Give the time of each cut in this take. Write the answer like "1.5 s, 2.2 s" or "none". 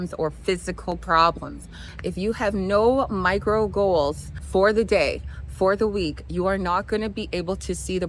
1.8 s